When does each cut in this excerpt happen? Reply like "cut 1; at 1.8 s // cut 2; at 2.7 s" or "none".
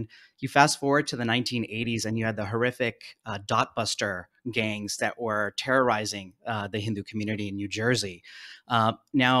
none